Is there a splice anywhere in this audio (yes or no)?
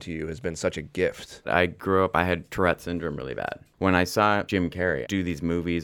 yes